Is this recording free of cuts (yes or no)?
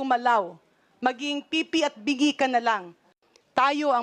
no